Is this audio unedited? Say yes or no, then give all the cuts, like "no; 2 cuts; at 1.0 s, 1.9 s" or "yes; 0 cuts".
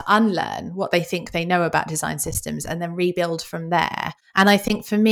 no; 1 cut; at 4.2 s